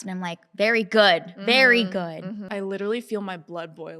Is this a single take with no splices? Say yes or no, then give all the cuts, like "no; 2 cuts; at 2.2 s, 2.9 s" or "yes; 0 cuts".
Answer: no; 1 cut; at 2.5 s